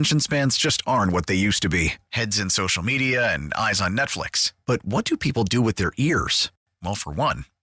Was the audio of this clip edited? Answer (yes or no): no